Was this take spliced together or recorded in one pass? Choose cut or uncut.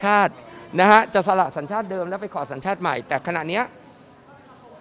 uncut